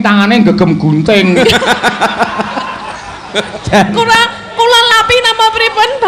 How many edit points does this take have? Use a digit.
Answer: 1